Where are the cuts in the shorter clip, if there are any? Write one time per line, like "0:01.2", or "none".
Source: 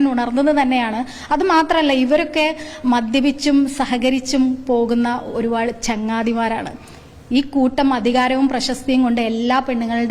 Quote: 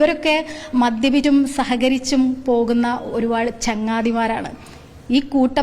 0:01.2